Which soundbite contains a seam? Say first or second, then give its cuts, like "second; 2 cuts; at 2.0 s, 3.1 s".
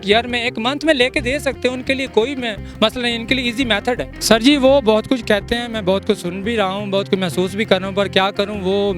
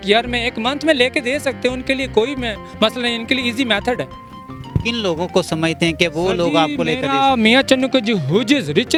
first; 1 cut; at 4.1 s